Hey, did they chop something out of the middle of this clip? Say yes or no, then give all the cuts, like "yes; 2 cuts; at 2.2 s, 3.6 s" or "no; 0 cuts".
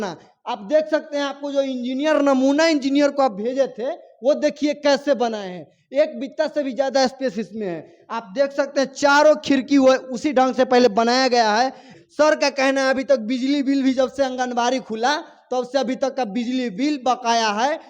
yes; 1 cut; at 11.9 s